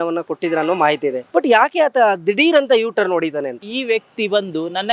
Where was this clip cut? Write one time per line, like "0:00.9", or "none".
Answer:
0:01.2
0:03.7